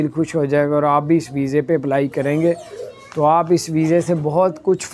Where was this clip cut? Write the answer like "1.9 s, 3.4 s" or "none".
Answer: none